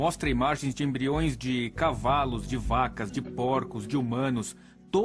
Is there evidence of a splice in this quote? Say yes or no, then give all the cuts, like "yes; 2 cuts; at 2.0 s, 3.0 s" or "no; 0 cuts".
no; 0 cuts